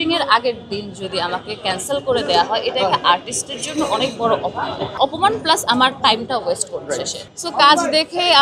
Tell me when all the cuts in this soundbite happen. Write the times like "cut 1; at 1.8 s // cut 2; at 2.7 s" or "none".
cut 1; at 4.9 s // cut 2; at 7.2 s

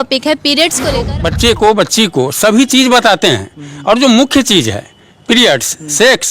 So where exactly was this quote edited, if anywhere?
cut 1; at 1.0 s

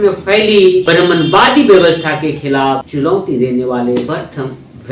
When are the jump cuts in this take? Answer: cut 1; at 0.8 s // cut 2; at 2.9 s // cut 3; at 4.1 s

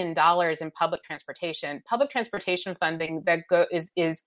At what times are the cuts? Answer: none

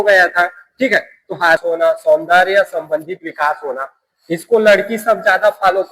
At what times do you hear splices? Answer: cut 1; at 1.6 s

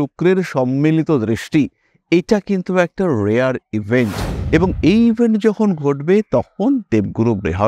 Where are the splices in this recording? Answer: none

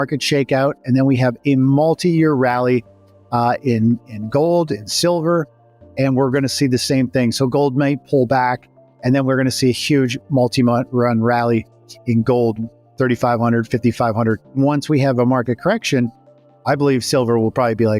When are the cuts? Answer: cut 1; at 14.5 s

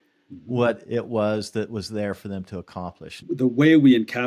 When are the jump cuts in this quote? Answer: cut 1; at 3.1 s

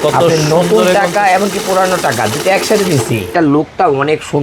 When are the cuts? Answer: cut 1; at 3.3 s

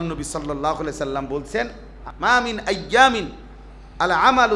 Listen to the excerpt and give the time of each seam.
cut 1; at 1.9 s

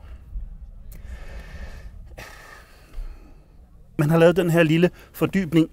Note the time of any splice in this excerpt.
cut 1; at 4.0 s

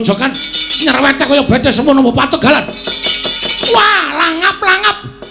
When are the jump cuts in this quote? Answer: none

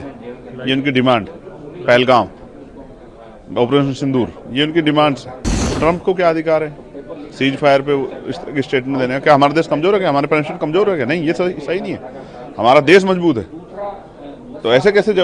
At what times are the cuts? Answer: cut 1; at 5.6 s

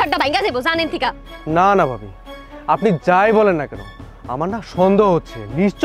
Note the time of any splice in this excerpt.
cut 1; at 1.3 s

